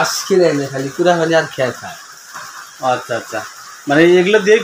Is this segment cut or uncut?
uncut